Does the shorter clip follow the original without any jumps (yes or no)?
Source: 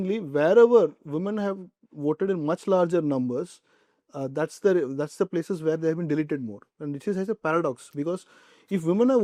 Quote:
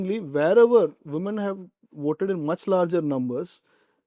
yes